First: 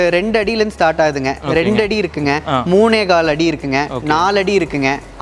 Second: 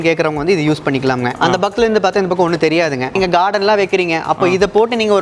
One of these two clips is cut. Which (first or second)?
second